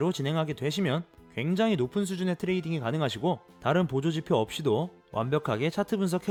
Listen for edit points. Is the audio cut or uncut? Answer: uncut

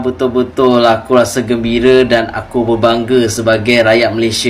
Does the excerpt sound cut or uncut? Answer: uncut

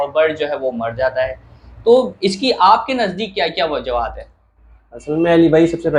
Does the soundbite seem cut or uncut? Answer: uncut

